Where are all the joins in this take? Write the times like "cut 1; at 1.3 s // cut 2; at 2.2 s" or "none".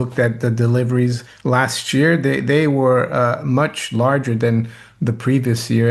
cut 1; at 1.3 s